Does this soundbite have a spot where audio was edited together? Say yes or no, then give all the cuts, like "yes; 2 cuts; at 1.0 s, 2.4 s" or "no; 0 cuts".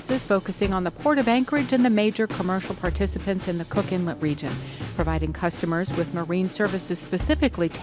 no; 0 cuts